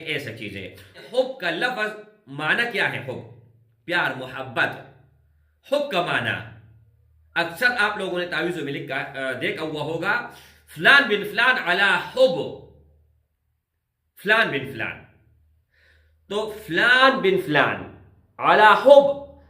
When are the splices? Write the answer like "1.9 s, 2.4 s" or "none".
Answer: 1.0 s